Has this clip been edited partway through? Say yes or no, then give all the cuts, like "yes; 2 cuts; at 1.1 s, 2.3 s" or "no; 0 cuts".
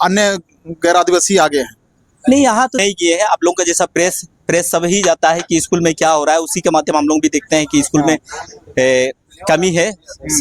yes; 1 cut; at 2.8 s